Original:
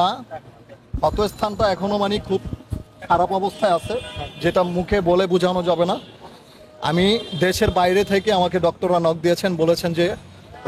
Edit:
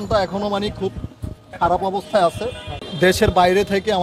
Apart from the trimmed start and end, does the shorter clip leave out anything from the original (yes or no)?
yes